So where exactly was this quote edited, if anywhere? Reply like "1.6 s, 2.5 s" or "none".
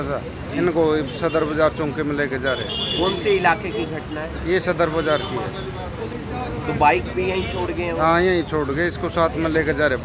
none